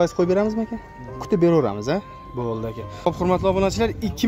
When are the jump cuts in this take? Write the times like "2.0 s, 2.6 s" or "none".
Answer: 2.9 s